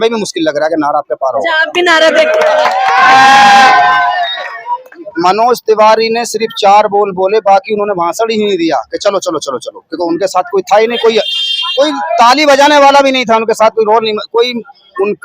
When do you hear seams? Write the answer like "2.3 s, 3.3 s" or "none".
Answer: 5.0 s